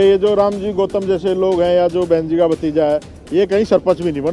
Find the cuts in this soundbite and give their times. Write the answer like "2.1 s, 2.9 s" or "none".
none